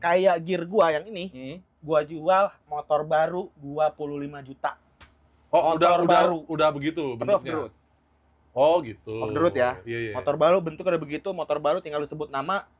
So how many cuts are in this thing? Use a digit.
0